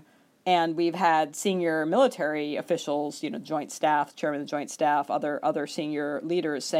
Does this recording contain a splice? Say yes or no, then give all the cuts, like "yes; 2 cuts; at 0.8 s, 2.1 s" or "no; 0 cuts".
no; 0 cuts